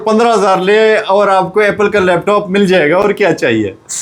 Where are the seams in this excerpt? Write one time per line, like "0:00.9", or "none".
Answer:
none